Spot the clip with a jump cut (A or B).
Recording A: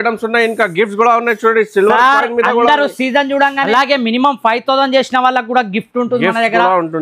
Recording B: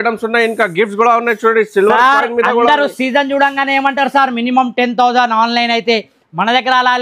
A